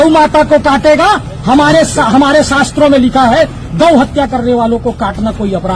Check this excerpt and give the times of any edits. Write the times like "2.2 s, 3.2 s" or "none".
none